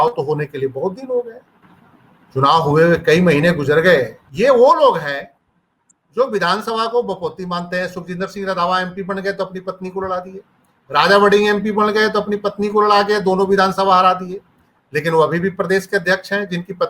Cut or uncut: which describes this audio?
cut